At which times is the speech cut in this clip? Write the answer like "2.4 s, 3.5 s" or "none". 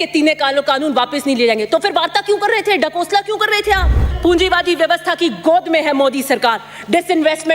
4.1 s